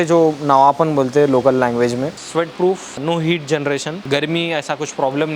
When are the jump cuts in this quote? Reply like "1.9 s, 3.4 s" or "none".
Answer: 2.2 s, 3.0 s, 3.9 s